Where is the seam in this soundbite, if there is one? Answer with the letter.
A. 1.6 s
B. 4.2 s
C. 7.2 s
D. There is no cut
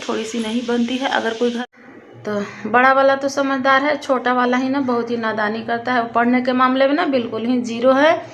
A